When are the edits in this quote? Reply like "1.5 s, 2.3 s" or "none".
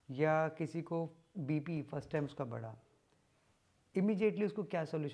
none